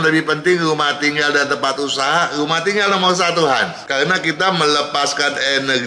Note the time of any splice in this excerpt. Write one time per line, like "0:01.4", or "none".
0:03.8